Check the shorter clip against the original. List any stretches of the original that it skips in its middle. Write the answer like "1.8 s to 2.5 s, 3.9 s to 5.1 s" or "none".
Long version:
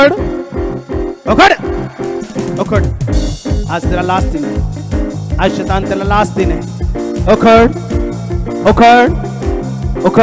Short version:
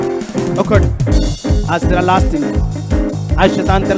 none